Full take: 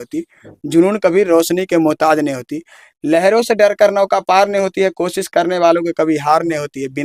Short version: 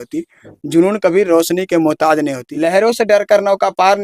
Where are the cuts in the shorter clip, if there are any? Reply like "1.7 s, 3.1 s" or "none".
2.4 s